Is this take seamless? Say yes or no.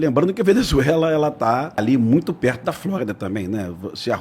no